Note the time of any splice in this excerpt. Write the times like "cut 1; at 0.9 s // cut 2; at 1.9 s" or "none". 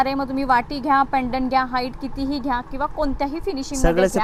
none